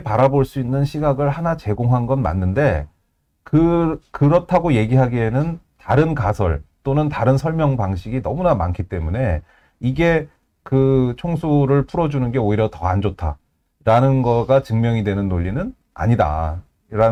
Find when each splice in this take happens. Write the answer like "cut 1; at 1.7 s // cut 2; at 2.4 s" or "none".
none